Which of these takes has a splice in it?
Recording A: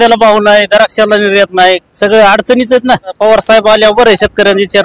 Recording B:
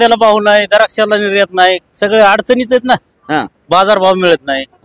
A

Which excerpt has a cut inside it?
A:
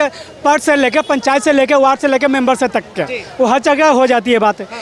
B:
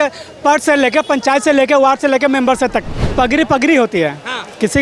B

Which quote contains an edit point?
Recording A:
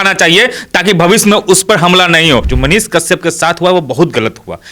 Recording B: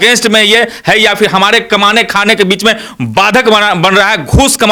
A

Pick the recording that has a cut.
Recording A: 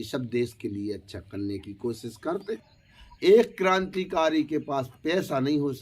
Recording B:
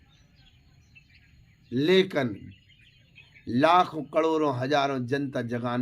A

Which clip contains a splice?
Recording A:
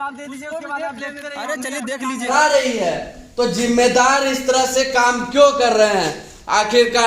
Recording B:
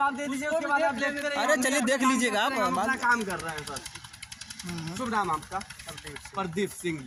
A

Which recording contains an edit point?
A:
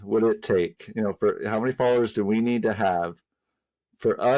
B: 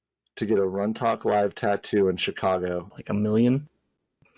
B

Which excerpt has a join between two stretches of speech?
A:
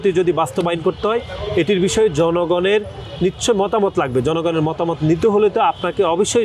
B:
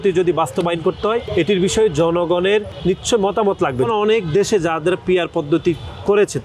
B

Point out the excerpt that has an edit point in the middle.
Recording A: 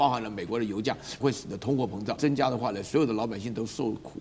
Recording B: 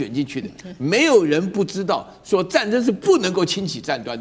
A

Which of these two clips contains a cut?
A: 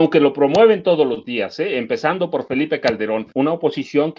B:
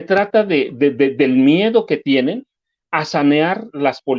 A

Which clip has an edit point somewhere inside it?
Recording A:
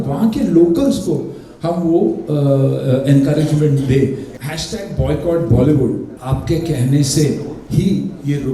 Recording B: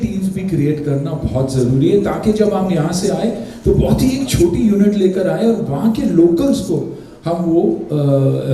A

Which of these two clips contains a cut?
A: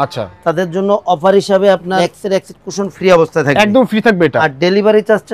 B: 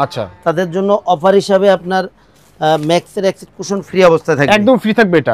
A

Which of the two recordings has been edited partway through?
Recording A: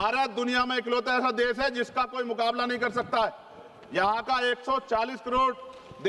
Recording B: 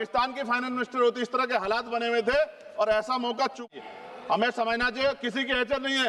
B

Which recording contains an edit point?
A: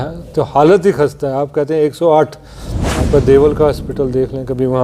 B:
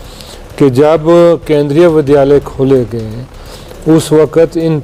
A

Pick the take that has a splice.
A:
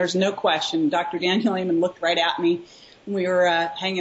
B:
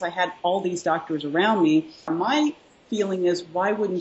B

